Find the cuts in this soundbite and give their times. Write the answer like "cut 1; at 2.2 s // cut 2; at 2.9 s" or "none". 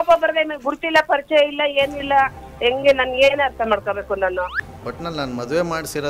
cut 1; at 4.6 s